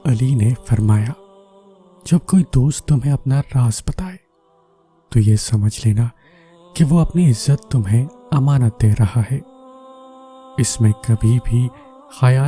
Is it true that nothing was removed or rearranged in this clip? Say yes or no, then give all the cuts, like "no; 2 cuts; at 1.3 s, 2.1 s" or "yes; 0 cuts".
yes; 0 cuts